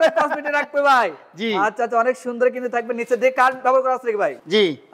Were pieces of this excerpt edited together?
no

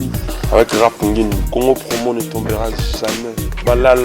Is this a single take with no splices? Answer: yes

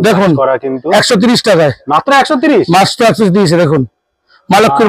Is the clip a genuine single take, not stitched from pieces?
yes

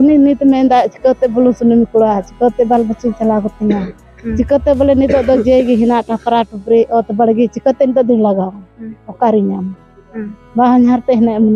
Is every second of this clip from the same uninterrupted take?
yes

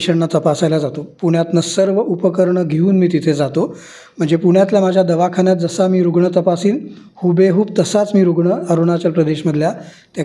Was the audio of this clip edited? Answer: no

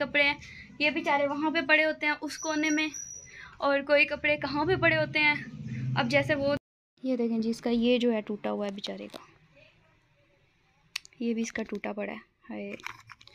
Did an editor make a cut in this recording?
yes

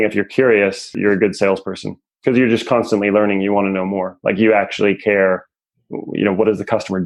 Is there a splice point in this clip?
yes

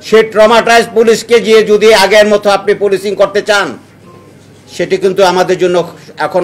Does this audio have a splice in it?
no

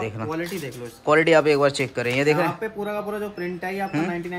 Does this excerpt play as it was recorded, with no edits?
yes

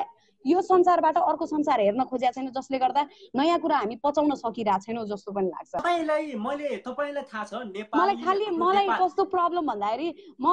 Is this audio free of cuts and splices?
no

